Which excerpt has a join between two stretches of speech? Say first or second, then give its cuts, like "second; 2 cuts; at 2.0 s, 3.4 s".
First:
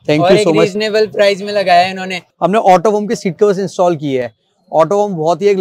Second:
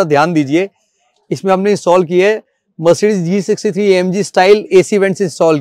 first; 1 cut; at 2.2 s